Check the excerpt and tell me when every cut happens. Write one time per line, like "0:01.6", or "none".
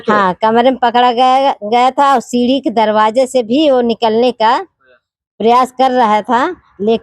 none